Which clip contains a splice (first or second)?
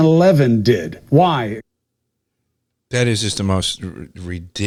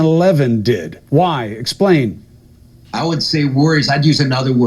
second